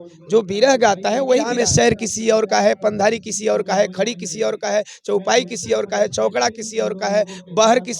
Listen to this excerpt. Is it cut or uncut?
cut